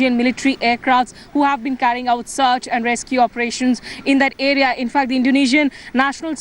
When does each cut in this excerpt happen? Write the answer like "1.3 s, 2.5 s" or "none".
3.5 s